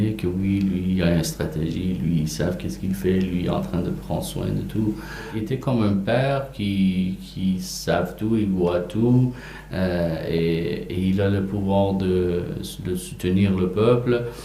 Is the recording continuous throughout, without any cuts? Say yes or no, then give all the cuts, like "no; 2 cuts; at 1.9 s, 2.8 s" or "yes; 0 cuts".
no; 1 cut; at 5.3 s